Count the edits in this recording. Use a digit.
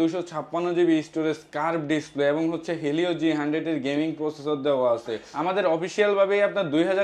1